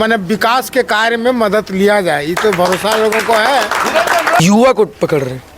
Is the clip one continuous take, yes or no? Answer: no